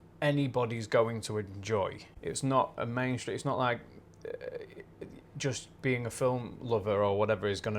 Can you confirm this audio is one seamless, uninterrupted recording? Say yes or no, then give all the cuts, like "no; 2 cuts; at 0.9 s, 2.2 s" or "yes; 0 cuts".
yes; 0 cuts